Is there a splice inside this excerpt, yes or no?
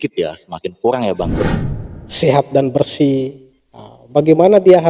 yes